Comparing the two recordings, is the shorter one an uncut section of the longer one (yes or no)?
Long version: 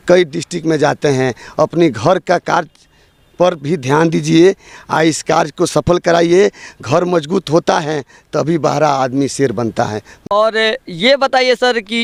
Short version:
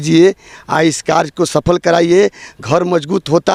yes